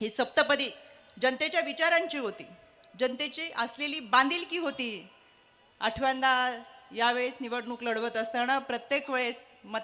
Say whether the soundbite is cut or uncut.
uncut